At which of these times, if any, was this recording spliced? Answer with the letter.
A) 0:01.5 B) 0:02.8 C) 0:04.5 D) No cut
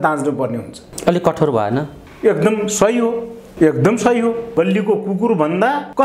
C